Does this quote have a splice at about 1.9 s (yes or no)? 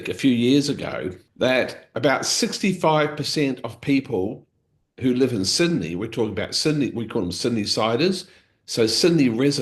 yes